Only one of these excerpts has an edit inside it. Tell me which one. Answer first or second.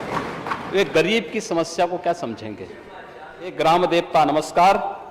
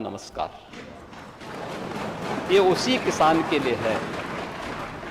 first